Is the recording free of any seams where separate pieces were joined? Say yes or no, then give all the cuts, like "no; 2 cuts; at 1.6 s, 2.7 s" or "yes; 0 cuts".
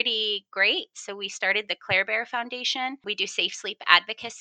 no; 1 cut; at 3.0 s